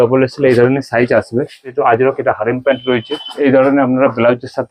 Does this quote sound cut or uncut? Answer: cut